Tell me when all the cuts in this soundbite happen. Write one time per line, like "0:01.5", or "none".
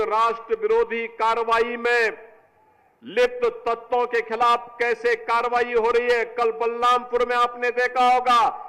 none